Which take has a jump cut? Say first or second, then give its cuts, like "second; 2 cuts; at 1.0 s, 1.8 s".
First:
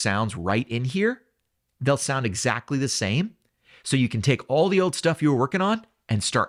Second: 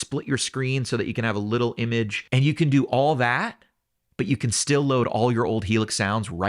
second; 1 cut; at 2.2 s